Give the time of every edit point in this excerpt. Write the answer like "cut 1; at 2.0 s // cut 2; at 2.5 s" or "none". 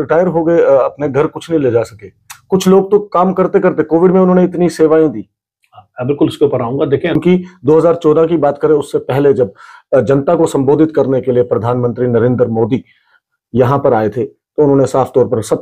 cut 1; at 7.2 s